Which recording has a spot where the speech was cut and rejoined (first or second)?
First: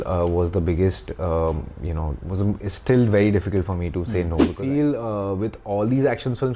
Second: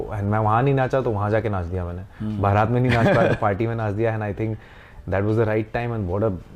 first